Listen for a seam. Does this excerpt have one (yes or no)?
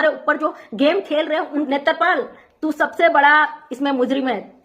yes